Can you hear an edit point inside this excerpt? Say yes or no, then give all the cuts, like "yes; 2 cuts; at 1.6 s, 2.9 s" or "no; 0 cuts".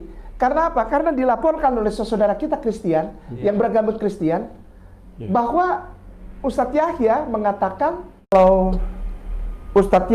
yes; 1 cut; at 8.3 s